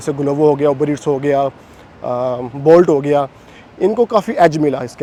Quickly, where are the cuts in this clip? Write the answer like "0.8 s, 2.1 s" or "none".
none